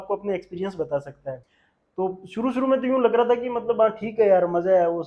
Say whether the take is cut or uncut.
cut